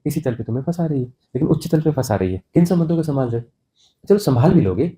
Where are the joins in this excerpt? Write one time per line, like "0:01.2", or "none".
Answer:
0:02.4